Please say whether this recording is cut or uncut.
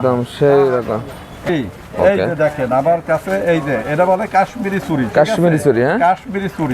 cut